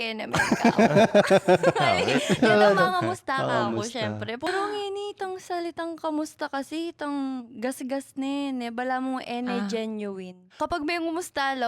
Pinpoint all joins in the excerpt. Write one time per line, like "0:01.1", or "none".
0:04.5
0:10.4

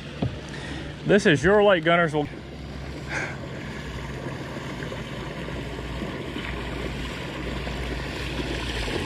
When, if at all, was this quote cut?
0:07.1

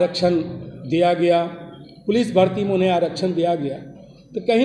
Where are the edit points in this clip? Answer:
none

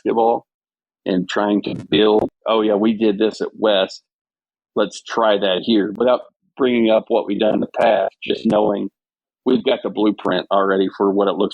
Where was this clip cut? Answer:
0:02.2
0:05.9

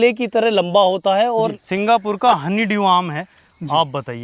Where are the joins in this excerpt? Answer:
0:01.6

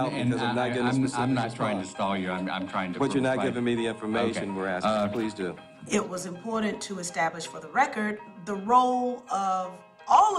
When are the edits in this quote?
none

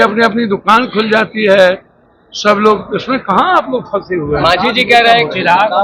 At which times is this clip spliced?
none

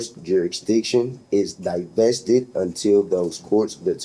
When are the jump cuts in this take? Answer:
none

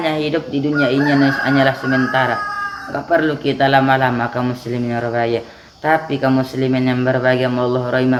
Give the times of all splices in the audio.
none

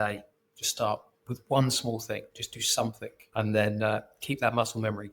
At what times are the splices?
0:03.1

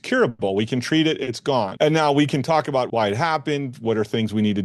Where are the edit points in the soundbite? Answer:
0:01.7
0:02.9

